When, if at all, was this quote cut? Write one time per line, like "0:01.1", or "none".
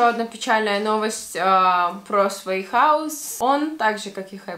0:03.2